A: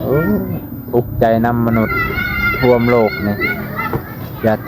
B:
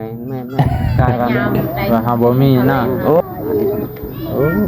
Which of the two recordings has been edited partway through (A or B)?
B